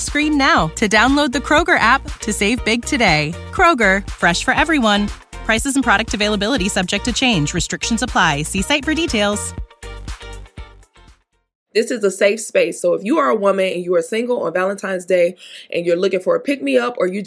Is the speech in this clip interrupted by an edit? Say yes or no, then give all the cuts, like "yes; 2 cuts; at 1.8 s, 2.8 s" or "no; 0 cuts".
yes; 1 cut; at 11.5 s